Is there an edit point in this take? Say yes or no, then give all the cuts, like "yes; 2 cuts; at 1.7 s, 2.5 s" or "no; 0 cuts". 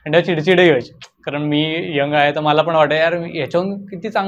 no; 0 cuts